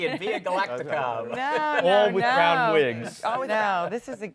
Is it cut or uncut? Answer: cut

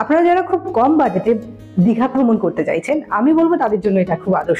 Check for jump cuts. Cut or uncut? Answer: uncut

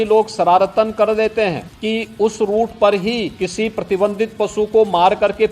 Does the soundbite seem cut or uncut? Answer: cut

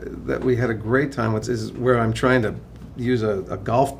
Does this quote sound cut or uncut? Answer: cut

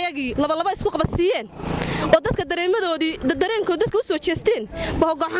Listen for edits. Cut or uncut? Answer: uncut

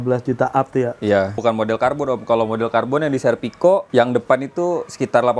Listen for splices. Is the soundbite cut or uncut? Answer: cut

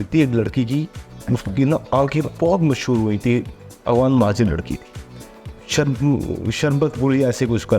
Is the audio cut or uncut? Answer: uncut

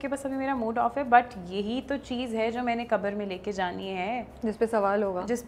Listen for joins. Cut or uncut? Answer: uncut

